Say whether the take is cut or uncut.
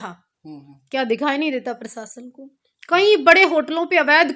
uncut